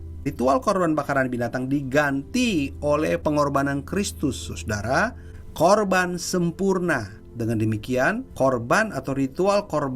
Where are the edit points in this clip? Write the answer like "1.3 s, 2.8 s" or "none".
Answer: 7.2 s, 8.3 s